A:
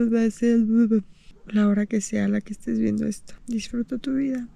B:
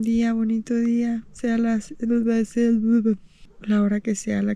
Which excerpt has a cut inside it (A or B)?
A